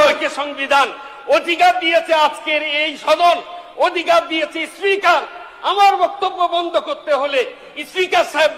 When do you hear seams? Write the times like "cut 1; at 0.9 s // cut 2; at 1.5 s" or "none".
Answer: none